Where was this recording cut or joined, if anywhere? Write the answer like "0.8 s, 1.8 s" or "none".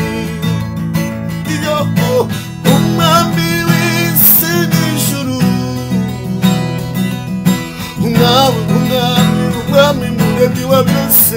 none